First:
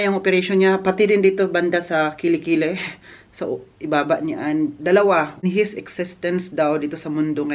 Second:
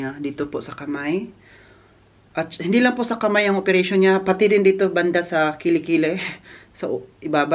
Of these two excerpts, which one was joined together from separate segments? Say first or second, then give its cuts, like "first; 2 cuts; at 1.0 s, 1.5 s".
first; 1 cut; at 5.4 s